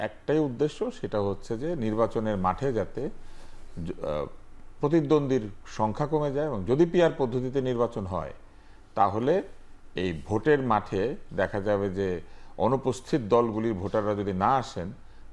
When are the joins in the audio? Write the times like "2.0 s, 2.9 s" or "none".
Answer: none